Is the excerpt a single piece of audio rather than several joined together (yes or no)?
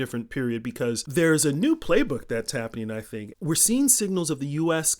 no